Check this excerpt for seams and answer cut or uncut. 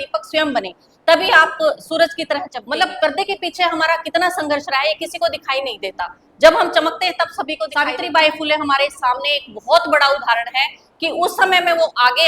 cut